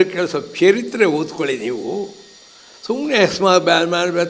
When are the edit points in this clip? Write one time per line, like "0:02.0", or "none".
none